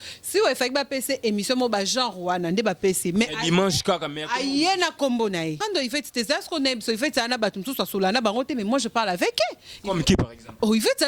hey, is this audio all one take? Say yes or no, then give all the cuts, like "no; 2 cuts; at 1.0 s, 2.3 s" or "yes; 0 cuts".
no; 1 cut; at 5.6 s